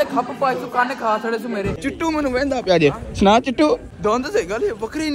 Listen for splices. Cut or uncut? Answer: cut